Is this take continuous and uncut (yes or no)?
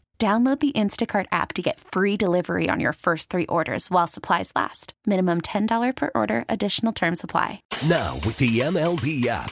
no